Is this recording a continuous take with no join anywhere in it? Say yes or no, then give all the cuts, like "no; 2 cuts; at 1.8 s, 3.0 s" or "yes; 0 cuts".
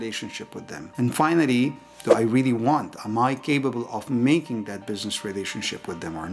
yes; 0 cuts